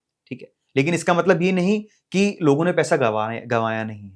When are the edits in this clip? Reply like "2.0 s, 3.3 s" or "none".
none